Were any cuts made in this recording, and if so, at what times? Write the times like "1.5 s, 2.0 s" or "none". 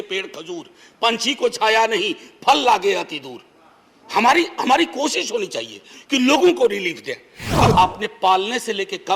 7.7 s